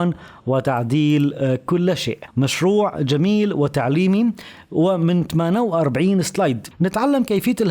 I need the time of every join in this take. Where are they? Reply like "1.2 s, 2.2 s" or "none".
2.2 s, 6.6 s